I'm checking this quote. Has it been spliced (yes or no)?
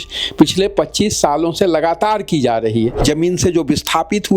yes